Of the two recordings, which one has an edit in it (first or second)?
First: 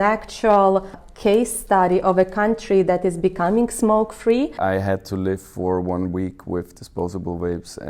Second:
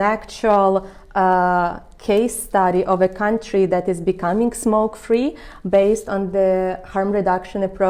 first